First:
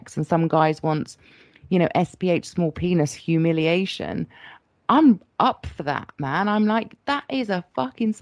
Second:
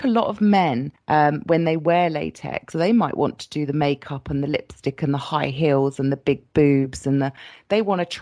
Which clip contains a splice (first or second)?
second